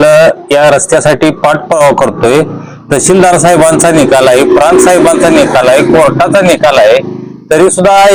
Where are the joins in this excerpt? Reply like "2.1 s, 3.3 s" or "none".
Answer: none